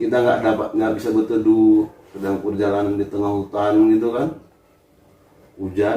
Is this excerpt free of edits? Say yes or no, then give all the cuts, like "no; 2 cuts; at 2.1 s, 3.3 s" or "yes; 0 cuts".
yes; 0 cuts